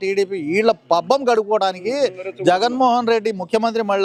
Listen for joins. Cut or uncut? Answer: uncut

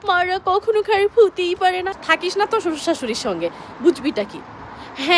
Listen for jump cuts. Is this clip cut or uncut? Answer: uncut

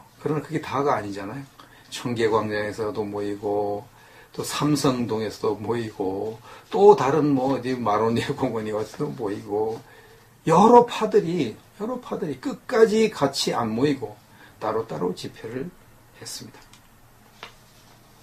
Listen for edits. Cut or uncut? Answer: cut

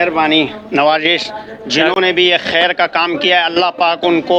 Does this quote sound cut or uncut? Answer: uncut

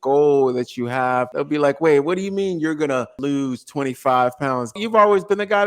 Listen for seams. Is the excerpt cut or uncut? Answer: cut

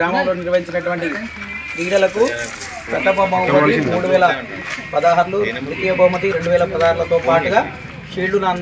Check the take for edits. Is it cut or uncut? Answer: uncut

